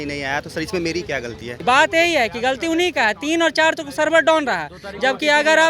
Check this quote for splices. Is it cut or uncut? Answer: cut